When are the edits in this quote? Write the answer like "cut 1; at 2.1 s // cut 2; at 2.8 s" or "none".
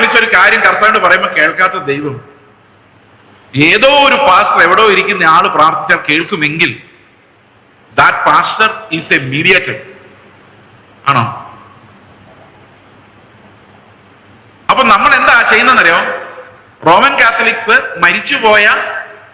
none